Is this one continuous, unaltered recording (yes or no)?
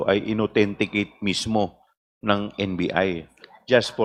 yes